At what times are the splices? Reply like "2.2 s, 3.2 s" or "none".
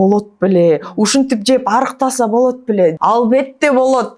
3.0 s